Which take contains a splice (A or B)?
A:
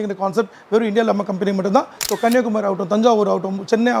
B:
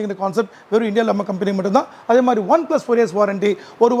A